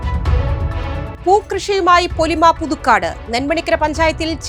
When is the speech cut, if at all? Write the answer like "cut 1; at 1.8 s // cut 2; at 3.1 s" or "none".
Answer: cut 1; at 1.1 s